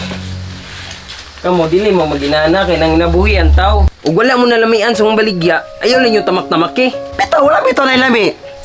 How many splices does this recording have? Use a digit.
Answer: 0